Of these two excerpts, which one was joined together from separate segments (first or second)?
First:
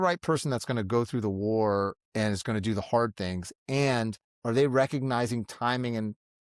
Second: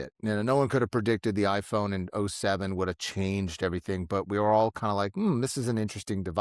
first